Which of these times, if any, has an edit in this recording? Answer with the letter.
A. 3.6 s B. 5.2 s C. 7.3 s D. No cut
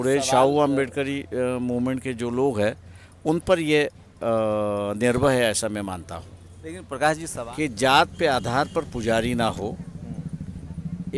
C